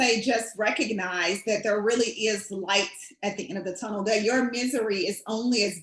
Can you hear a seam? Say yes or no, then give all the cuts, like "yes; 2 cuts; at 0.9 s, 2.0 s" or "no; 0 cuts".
no; 0 cuts